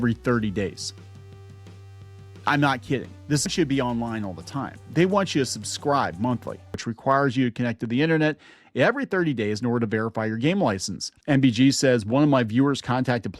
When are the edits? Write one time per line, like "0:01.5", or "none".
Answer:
0:03.5
0:06.9
0:11.2

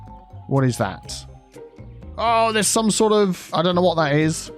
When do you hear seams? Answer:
0:03.4

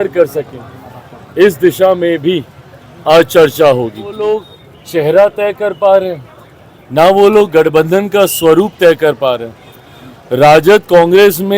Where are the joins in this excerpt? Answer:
0:04.2

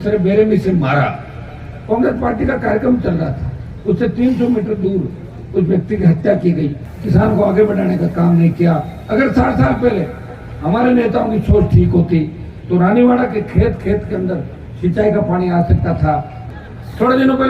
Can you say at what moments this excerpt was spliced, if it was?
0:06.9
0:16.4

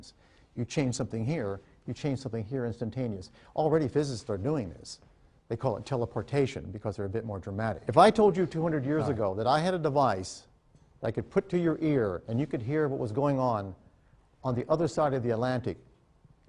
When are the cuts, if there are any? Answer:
0:07.8

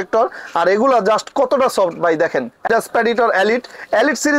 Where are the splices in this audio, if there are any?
0:02.7

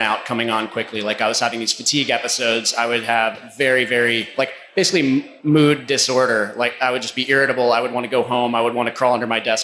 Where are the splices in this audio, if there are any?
0:05.3

